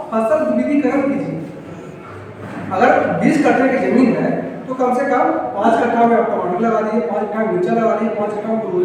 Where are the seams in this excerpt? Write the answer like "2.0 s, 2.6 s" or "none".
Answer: none

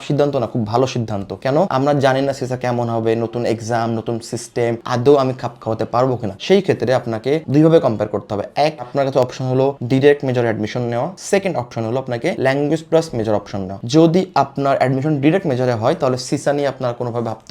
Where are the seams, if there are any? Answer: none

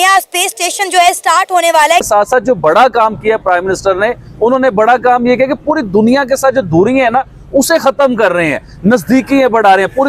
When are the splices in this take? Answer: 2.0 s

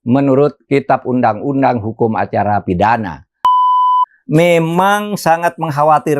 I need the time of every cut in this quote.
3.8 s

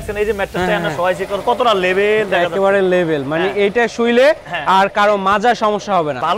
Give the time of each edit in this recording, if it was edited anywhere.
none

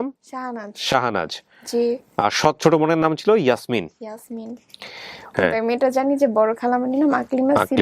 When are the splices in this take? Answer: 5.3 s

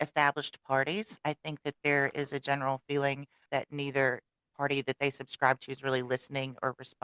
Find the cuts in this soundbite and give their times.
1.1 s, 3.4 s

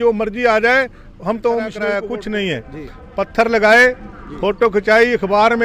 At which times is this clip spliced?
1.8 s

